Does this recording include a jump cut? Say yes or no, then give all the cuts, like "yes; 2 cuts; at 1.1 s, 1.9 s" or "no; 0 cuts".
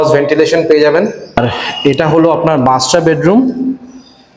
yes; 1 cut; at 1.4 s